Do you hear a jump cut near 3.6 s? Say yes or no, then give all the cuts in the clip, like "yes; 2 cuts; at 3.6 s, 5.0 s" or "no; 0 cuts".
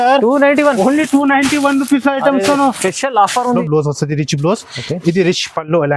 yes; 1 cut; at 3.6 s